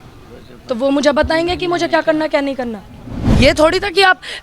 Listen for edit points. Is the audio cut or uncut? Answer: cut